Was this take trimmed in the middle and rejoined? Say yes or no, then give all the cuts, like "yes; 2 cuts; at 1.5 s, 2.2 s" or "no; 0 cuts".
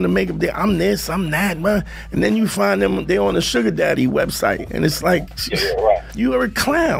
yes; 1 cut; at 6.1 s